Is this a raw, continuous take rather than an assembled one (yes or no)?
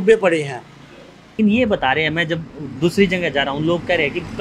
no